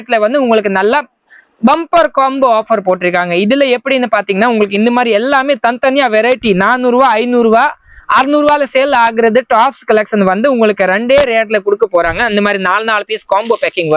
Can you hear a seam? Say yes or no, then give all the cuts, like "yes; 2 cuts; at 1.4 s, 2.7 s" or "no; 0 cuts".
no; 0 cuts